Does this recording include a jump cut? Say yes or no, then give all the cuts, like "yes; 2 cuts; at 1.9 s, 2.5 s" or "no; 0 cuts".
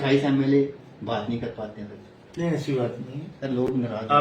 no; 0 cuts